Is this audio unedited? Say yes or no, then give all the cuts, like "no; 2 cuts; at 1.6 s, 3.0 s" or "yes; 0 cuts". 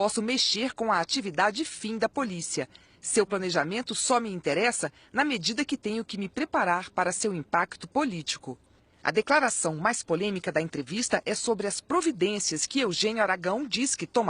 yes; 0 cuts